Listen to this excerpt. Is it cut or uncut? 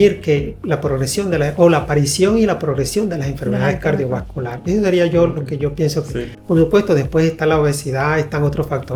uncut